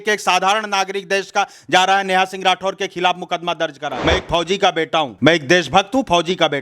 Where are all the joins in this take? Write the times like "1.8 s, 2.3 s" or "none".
3.9 s